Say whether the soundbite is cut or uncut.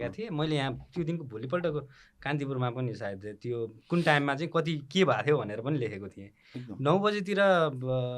uncut